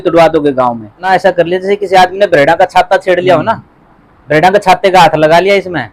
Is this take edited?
yes; 1 cut; at 1.0 s

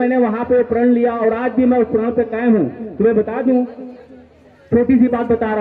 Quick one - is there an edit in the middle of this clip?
no; 0 cuts

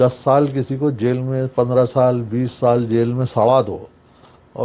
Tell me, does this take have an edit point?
no; 0 cuts

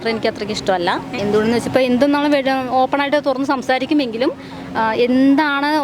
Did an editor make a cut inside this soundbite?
yes; 1 cut; at 1.1 s

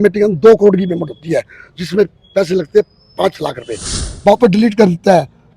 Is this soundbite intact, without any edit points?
no; 1 cut; at 4.0 s

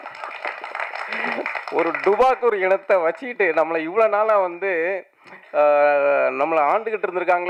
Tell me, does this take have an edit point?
no; 0 cuts

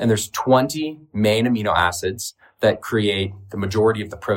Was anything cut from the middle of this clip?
no; 0 cuts

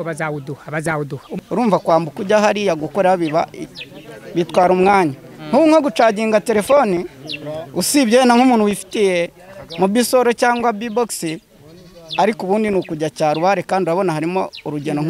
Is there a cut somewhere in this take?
yes; 1 cut; at 1.3 s

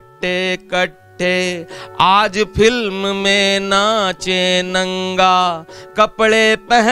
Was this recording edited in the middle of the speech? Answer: no; 0 cuts

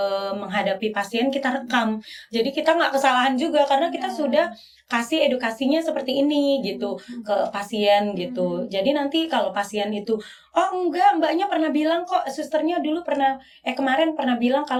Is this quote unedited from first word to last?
yes; 0 cuts

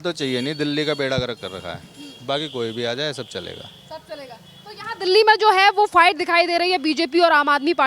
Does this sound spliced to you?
no; 0 cuts

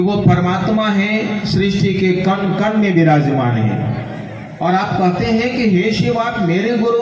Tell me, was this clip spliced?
no; 0 cuts

